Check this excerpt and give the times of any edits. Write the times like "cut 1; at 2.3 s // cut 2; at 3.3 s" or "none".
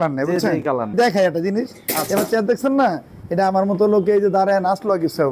cut 1; at 0.9 s